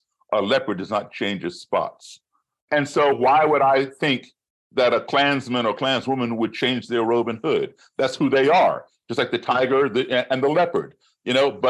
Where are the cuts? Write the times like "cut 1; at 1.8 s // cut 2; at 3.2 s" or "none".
cut 1; at 2.6 s